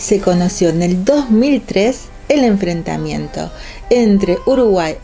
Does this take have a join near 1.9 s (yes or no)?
no